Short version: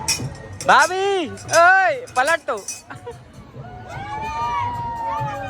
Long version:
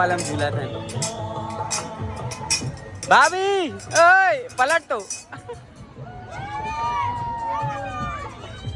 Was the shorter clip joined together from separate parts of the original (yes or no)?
no